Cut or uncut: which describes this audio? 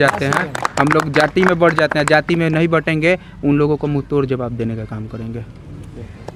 uncut